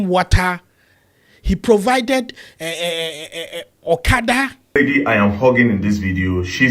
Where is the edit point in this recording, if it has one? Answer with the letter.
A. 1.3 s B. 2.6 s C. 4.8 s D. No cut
C